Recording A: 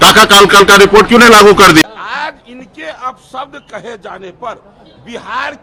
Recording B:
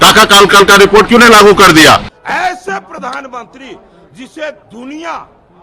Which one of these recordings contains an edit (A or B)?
B